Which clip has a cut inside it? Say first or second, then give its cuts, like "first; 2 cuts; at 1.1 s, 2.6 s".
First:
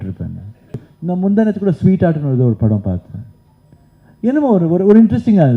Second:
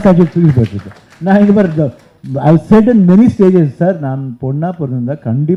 first; 1 cut; at 0.9 s